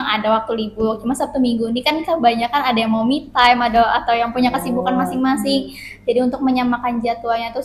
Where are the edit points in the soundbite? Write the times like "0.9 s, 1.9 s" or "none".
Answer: none